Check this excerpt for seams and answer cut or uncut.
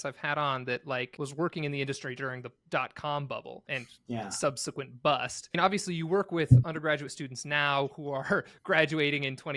cut